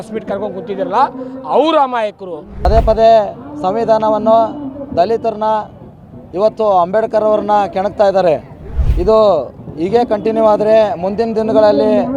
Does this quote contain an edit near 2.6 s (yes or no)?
yes